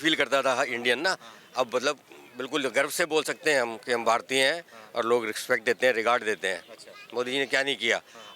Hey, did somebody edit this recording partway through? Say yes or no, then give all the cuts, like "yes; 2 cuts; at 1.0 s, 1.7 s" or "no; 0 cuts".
no; 0 cuts